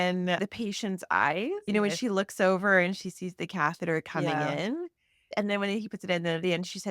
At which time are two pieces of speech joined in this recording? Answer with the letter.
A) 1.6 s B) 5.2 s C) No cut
A